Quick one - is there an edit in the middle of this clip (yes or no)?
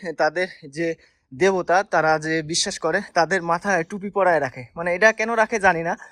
no